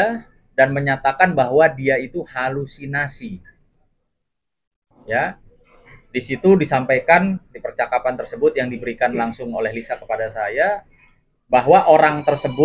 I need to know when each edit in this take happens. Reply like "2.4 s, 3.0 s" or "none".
none

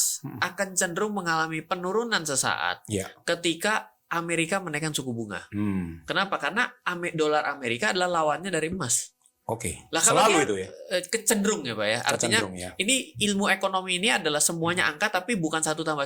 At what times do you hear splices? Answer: none

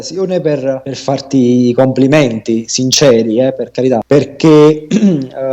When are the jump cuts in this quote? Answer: 0.9 s, 4.0 s

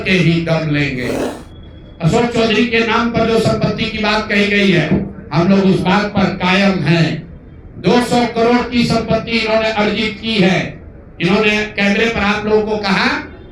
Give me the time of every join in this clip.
1.2 s

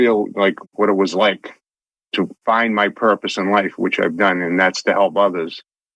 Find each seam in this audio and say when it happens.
2.1 s

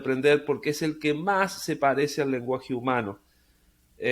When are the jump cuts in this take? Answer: none

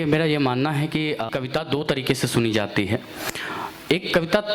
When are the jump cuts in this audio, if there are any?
1.3 s

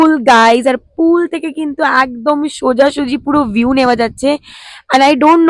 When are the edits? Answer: none

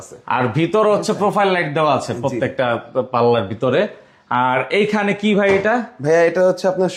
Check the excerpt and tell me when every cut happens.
none

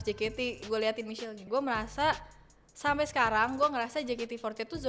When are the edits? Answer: 1.4 s

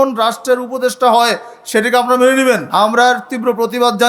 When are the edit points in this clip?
2.6 s

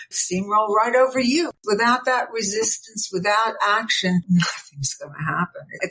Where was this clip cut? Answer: 1.6 s, 4.2 s

